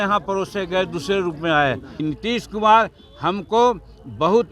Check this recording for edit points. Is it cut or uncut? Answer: cut